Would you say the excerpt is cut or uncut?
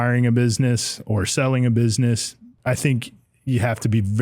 cut